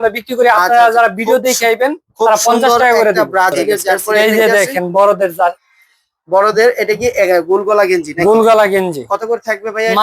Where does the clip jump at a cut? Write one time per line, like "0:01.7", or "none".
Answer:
0:04.0